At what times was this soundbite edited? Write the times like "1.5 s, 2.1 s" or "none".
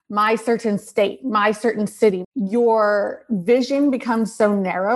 2.2 s